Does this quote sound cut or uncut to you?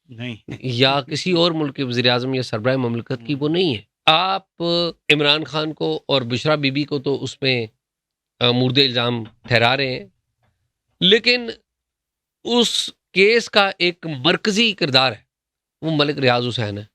cut